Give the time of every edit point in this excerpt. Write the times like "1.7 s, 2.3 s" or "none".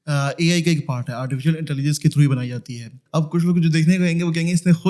3.0 s